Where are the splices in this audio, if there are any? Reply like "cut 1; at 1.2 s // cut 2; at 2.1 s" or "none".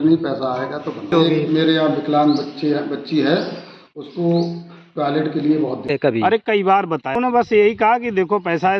cut 1; at 1.1 s // cut 2; at 5.9 s // cut 3; at 7.2 s